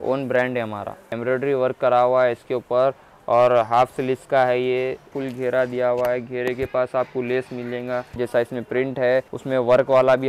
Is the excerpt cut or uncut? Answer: cut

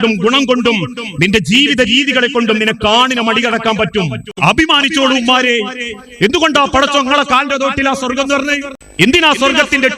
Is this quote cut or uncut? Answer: cut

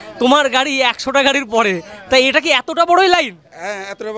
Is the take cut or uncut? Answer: uncut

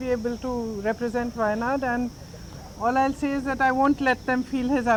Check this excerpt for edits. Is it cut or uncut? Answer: uncut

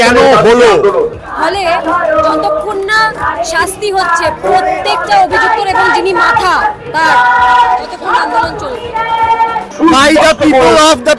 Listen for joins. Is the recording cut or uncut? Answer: cut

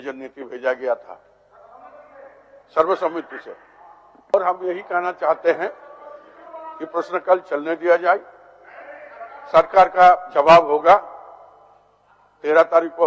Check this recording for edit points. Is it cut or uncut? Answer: cut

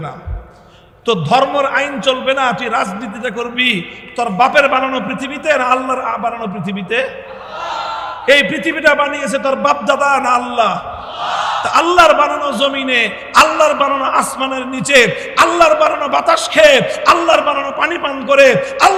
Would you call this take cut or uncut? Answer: uncut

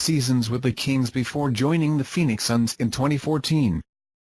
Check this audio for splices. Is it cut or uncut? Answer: uncut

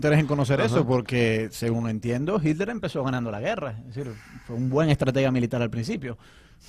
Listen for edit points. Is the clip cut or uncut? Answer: uncut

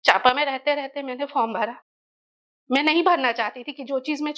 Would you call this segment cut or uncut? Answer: uncut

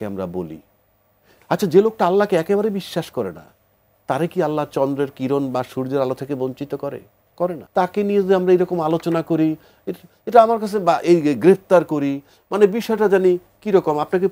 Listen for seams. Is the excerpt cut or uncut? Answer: cut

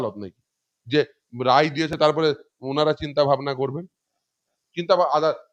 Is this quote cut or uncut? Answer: uncut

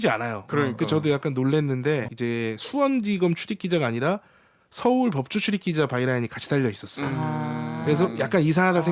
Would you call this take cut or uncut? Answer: cut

